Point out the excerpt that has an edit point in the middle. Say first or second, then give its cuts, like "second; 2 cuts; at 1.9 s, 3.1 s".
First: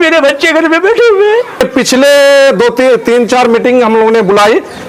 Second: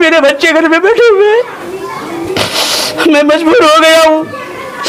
first; 1 cut; at 1.6 s